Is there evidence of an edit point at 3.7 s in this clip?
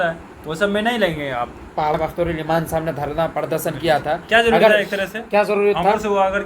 no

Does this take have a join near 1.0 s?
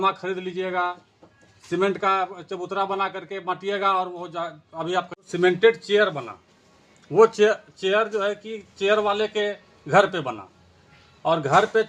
no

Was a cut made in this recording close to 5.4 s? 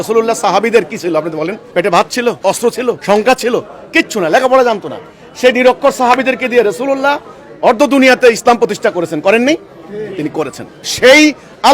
no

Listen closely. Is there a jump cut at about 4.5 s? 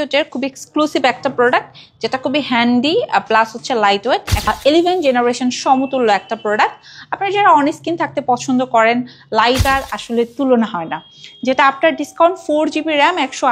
yes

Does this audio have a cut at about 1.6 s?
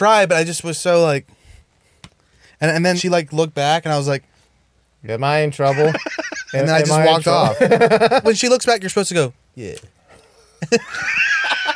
no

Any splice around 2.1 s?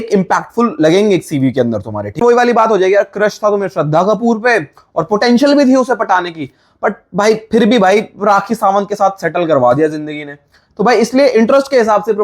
yes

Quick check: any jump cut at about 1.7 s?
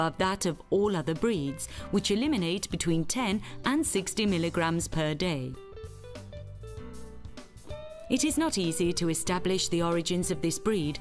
no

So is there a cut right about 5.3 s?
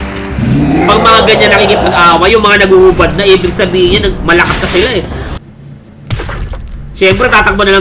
yes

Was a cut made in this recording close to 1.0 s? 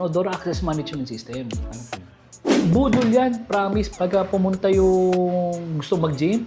no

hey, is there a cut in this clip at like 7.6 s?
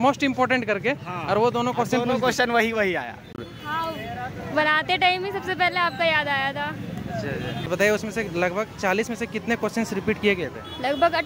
yes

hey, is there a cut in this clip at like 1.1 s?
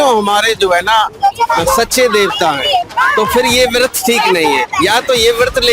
no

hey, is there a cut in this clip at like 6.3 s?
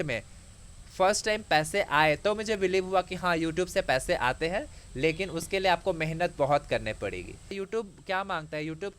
no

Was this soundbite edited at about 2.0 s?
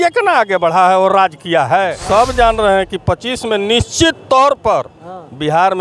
yes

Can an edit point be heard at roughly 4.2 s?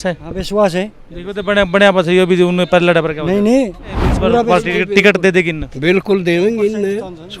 yes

